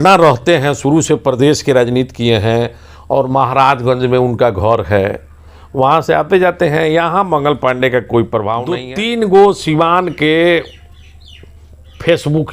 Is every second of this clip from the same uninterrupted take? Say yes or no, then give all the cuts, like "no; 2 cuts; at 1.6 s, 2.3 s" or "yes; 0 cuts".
no; 1 cut; at 8.8 s